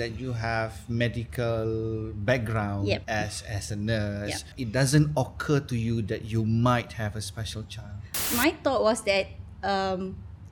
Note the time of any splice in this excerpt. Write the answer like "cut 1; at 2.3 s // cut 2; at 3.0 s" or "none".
cut 1; at 3.0 s // cut 2; at 4.5 s // cut 3; at 8.1 s